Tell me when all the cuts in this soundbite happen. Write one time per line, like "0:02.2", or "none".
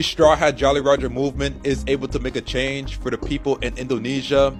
none

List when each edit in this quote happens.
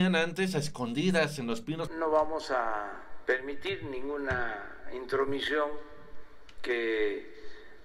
0:01.9

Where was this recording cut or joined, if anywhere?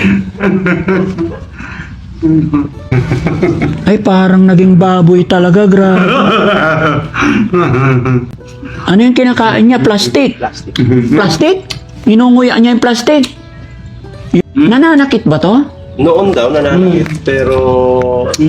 0:02.9
0:14.4

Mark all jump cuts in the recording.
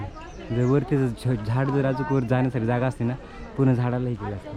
none

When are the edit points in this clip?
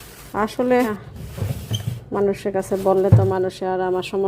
0:01.0

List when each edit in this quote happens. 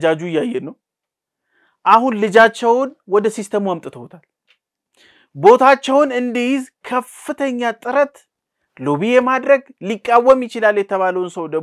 none

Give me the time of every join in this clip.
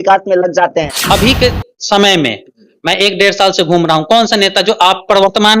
0:01.0

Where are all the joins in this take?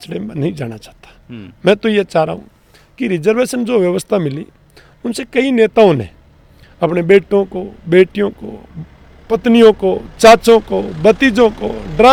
none

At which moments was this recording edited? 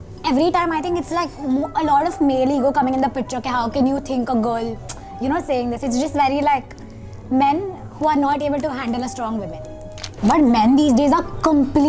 0:10.1

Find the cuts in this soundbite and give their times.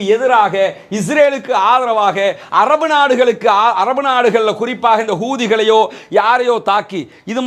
none

